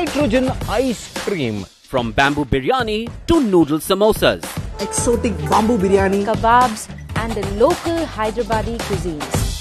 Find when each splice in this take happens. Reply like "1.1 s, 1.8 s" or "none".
none